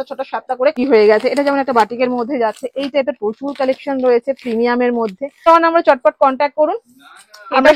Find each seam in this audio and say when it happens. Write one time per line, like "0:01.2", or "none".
0:00.8
0:05.5